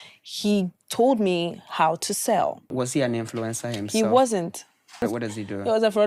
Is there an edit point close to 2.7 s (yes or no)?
yes